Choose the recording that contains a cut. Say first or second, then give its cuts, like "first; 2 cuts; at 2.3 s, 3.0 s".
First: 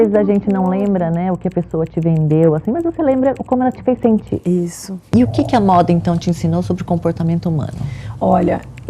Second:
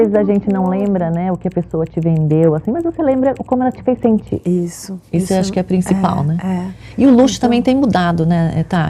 first; 1 cut; at 5.0 s